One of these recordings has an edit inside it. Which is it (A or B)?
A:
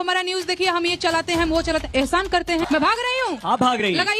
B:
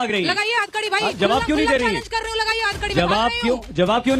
A